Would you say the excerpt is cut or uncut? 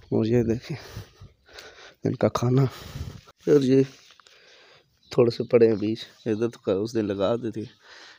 cut